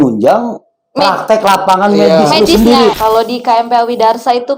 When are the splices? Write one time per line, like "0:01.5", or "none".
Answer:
0:03.0